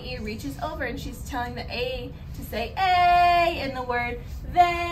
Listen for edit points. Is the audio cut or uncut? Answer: uncut